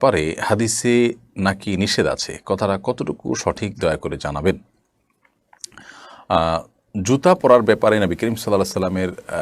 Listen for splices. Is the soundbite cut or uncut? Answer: uncut